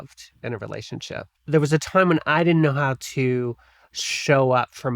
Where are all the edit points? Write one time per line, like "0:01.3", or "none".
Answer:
0:01.4